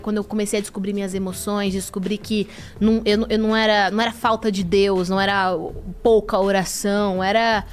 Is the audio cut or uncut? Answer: uncut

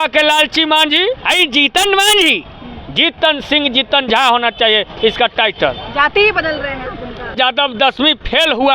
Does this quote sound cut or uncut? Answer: cut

